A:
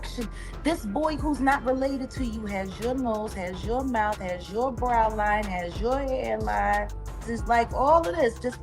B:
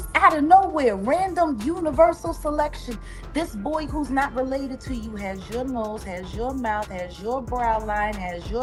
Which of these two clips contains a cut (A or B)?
A